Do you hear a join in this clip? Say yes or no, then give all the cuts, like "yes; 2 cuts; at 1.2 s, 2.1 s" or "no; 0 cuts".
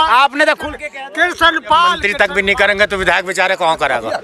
yes; 1 cut; at 2.0 s